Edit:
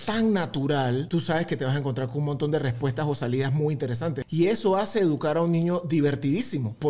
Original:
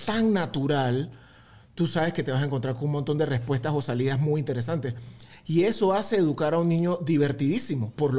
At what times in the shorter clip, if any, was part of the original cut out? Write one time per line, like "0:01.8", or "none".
0:01.1
0:04.2